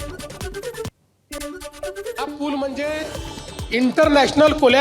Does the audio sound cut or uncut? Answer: cut